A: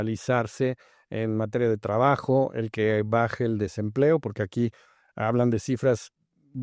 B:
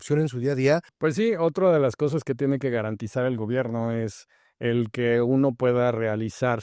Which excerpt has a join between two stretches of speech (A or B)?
B